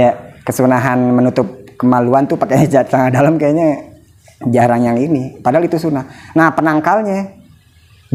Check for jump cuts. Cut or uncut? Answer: uncut